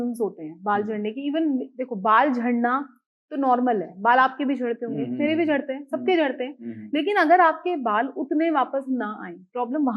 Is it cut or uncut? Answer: uncut